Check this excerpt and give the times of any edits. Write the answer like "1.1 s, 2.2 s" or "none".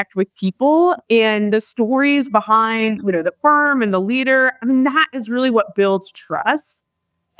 none